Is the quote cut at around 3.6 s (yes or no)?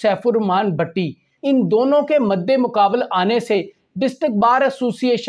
no